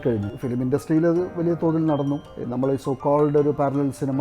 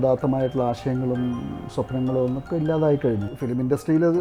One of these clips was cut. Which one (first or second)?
first